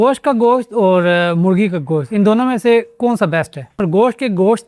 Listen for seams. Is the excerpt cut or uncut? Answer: cut